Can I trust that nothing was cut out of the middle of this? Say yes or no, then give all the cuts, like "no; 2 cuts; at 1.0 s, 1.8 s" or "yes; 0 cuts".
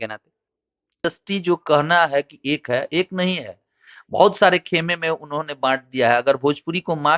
no; 1 cut; at 1.0 s